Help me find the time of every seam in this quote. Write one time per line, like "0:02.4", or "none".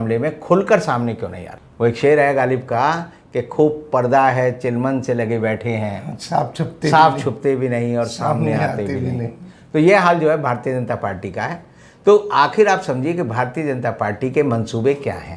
none